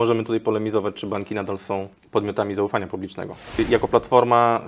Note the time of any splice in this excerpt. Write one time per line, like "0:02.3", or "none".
0:02.0
0:03.6